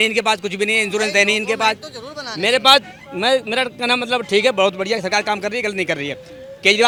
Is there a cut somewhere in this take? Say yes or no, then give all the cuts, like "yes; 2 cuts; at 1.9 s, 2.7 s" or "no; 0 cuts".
no; 0 cuts